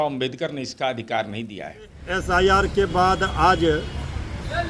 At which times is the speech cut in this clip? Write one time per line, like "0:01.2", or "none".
0:01.9